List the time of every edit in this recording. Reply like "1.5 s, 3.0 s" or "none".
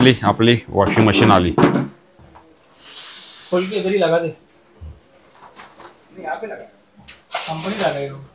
none

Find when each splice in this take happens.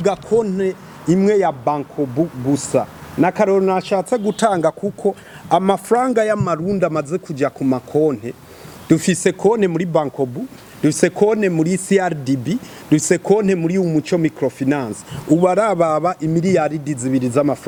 none

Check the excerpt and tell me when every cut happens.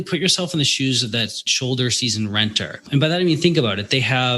1.4 s, 2.8 s

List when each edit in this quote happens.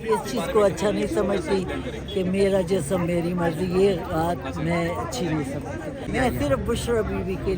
6.1 s

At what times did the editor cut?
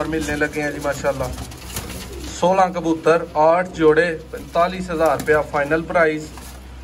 none

